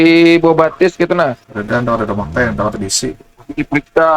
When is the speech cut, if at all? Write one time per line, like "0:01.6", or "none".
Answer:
0:01.5